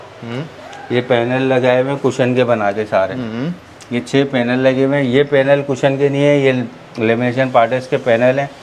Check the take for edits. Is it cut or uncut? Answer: uncut